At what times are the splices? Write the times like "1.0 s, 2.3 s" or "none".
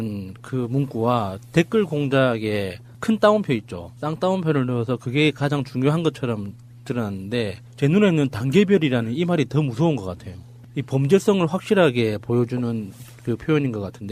10.6 s